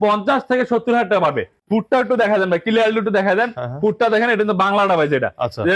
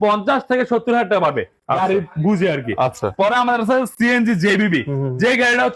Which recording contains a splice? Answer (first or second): first